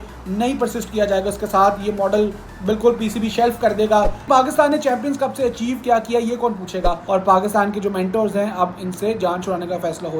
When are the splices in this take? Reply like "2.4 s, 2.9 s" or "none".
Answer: 4.3 s, 7.0 s